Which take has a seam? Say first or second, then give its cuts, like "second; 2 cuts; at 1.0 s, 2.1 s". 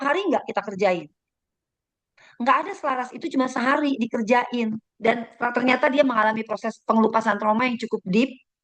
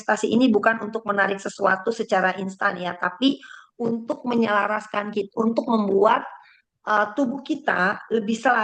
first; 1 cut; at 4.9 s